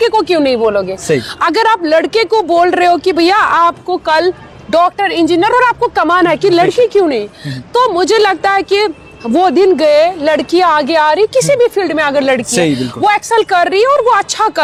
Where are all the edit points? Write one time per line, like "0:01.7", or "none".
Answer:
none